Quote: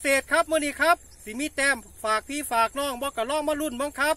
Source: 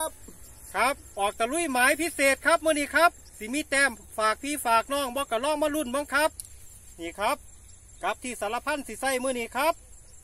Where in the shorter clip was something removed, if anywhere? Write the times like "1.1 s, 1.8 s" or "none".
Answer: none